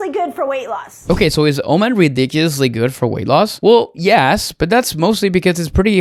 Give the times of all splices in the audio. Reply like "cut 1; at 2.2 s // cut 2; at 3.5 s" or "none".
none

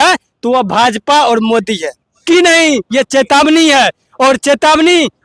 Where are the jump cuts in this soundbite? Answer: cut 1; at 2.2 s

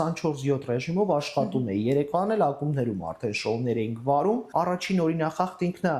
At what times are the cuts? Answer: cut 1; at 4.5 s

